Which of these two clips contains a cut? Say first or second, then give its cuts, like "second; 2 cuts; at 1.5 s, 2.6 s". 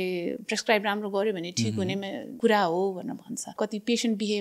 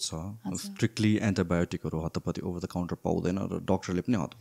first; 2 cuts; at 2.2 s, 3.4 s